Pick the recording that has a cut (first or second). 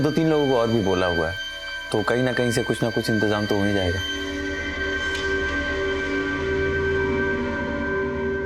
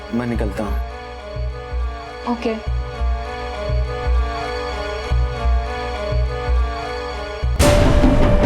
second